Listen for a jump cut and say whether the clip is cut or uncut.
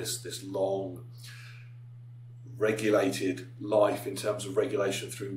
uncut